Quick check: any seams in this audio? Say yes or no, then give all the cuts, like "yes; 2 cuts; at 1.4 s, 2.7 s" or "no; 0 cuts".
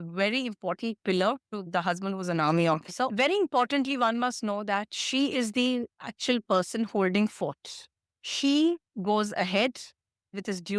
yes; 3 cuts; at 1.6 s, 3.1 s, 8.1 s